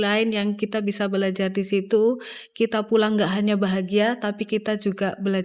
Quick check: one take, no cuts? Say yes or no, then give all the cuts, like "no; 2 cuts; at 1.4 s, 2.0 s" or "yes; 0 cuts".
yes; 0 cuts